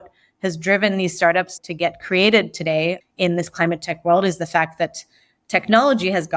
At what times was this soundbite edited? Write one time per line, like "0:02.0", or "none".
0:01.6